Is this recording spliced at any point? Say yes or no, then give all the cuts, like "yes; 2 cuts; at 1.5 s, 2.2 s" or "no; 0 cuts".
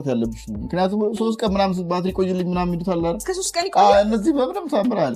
no; 0 cuts